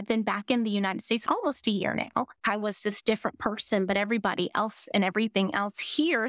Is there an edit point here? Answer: yes; 1 cut; at 2.3 s

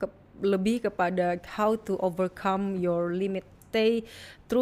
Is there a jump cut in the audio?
yes; 1 cut; at 3.6 s

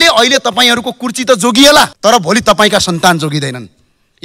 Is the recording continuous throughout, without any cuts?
no; 1 cut; at 1.9 s

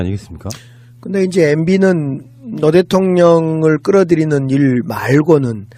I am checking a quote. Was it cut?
yes; 1 cut; at 1.3 s

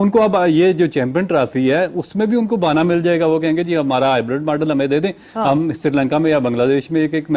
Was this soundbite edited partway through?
no; 0 cuts

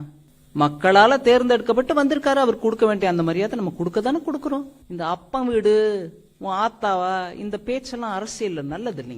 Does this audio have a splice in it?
yes; 1 cut; at 4.8 s

